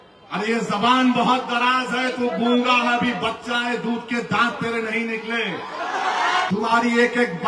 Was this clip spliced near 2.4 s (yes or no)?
no